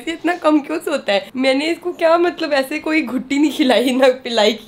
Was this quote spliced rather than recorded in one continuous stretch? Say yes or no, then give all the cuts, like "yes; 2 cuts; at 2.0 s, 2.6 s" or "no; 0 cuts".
no; 0 cuts